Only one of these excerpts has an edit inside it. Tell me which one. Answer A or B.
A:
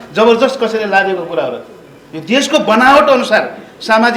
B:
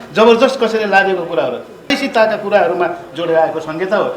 B